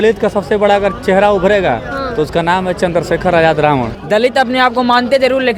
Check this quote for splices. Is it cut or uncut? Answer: cut